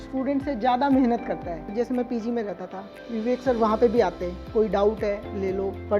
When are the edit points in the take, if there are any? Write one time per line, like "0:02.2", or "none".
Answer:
0:01.7